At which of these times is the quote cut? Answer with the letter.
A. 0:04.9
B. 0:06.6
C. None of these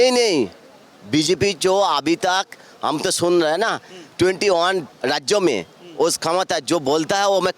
A